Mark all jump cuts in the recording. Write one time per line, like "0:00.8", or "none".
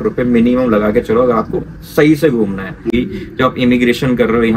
0:02.9